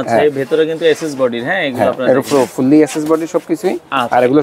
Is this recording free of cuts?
yes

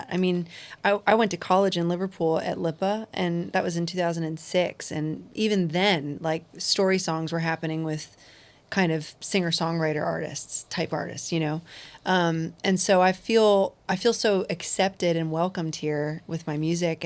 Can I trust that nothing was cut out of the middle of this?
yes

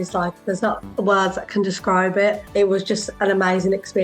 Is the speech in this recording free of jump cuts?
no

